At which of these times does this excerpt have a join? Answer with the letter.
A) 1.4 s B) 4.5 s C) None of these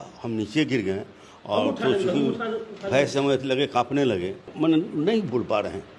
B